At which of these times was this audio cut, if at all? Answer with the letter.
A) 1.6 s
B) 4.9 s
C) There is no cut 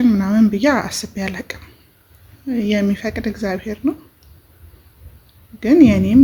C